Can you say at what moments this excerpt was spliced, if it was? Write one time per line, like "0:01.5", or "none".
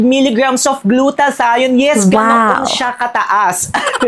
none